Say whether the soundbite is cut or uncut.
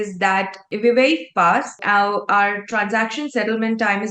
uncut